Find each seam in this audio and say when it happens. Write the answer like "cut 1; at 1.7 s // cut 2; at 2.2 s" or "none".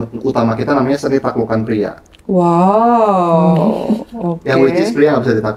none